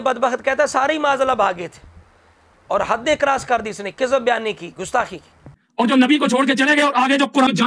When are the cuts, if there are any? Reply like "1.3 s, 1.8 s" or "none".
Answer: 2.1 s, 5.6 s